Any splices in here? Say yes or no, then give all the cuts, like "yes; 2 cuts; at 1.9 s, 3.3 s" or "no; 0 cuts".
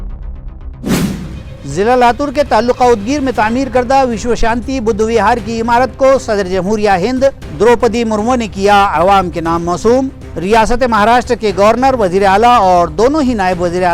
yes; 1 cut; at 0.9 s